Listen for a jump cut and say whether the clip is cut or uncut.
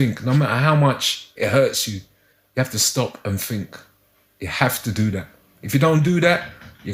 uncut